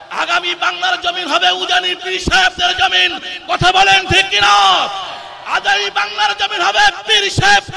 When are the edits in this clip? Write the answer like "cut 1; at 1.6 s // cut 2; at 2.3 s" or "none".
none